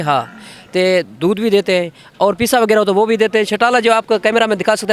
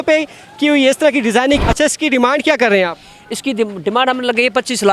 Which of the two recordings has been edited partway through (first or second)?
second